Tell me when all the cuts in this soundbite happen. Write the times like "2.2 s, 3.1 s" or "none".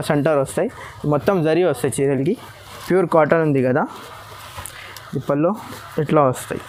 none